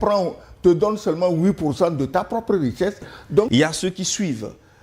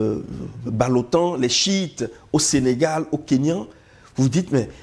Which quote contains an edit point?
first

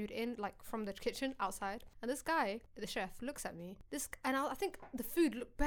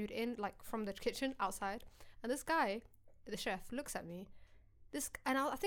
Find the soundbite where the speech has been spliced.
first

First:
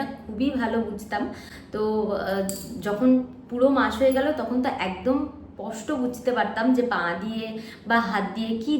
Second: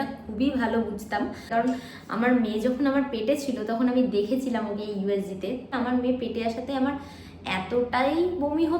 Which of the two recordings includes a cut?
second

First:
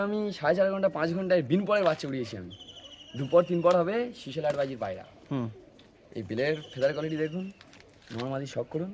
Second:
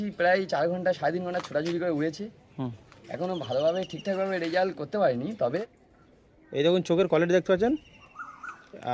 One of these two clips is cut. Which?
second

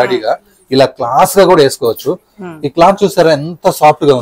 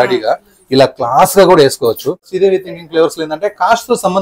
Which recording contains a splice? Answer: second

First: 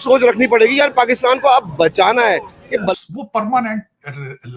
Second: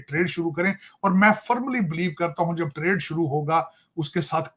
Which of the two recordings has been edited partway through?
first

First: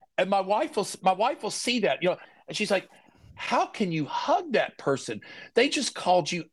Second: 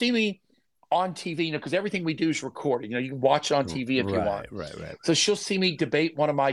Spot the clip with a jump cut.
first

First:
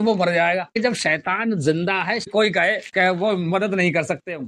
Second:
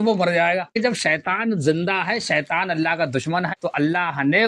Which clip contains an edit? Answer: first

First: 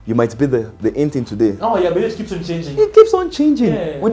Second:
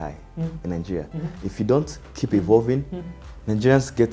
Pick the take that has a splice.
first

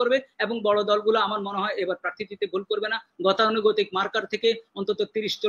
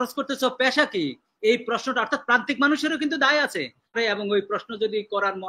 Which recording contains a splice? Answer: second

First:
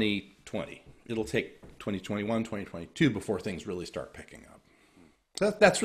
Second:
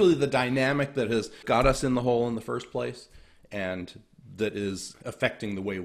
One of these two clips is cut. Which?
second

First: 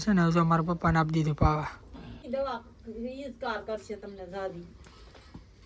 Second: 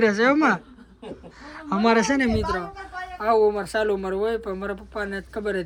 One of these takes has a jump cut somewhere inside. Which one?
first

